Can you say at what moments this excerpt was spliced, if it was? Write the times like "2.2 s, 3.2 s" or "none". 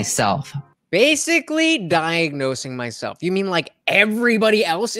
none